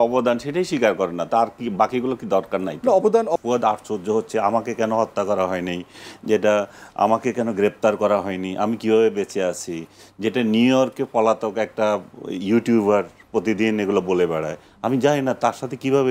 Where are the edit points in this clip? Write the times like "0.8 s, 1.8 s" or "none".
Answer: 3.4 s